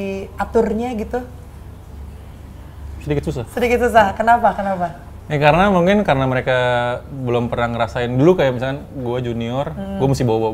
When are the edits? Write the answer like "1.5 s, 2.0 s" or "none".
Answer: none